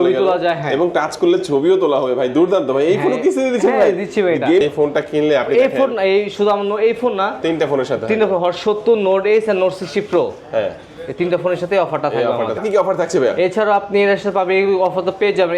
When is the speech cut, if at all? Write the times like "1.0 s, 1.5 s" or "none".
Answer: 4.6 s, 12.6 s